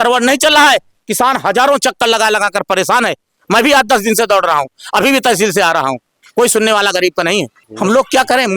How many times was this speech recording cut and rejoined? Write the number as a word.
zero